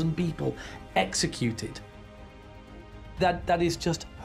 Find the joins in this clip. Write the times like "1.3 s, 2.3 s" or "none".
none